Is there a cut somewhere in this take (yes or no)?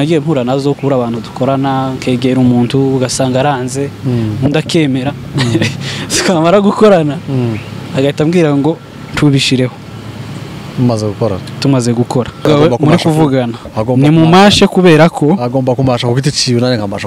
yes